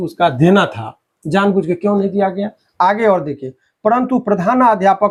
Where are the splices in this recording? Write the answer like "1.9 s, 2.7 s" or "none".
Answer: none

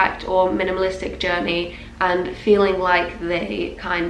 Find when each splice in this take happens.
none

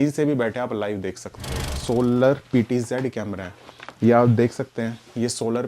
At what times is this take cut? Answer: 1.8 s

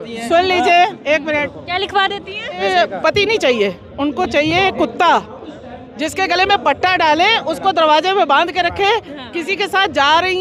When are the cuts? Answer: 2.6 s

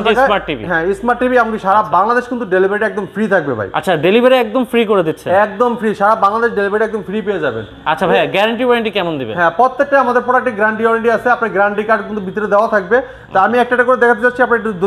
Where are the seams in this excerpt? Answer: none

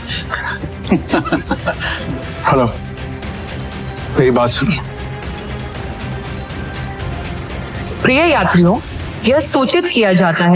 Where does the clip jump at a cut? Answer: 1.9 s, 5.7 s

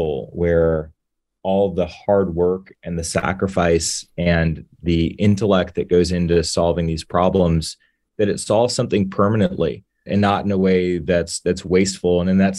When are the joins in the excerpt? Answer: none

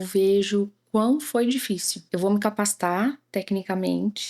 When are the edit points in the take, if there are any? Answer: 1.9 s

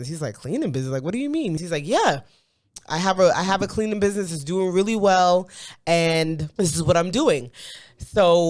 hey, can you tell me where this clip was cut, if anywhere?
1.6 s, 6.4 s

